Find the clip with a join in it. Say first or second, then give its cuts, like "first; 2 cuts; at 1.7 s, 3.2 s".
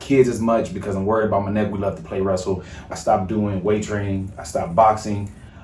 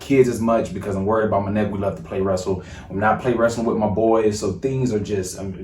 first; 1 cut; at 2.9 s